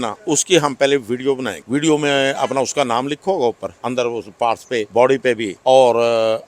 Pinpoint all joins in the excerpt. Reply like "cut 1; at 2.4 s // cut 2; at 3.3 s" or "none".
cut 1; at 1.5 s // cut 2; at 3.7 s // cut 3; at 4.9 s // cut 4; at 5.5 s